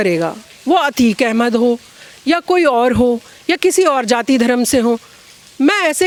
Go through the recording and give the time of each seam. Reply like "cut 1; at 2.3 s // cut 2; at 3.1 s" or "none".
none